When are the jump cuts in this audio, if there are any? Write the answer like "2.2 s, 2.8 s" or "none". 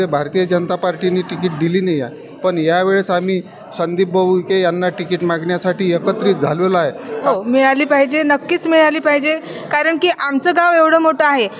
7.1 s